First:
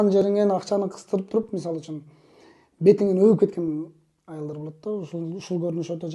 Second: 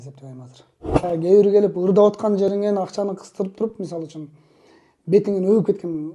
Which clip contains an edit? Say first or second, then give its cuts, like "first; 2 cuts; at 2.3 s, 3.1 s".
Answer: second; 1 cut; at 1.0 s